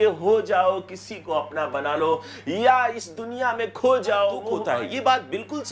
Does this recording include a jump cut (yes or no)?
yes